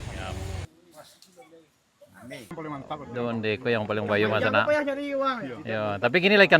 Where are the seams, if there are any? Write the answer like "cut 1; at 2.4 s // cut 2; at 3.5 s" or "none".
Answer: cut 1; at 2.5 s